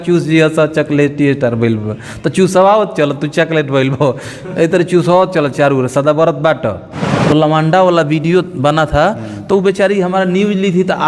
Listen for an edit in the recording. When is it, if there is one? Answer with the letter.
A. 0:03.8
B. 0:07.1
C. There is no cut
B